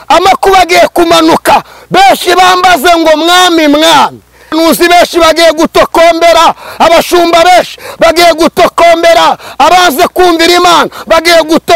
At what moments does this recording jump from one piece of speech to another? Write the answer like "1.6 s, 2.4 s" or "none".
4.5 s

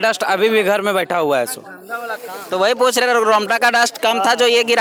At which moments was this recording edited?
none

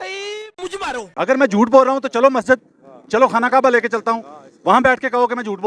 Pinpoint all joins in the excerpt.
1.1 s

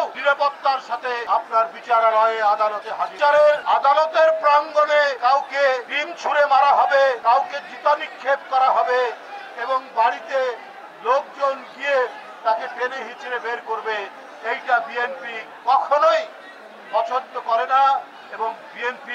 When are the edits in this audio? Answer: none

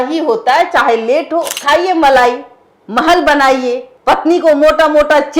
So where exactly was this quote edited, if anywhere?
1.5 s, 3.9 s

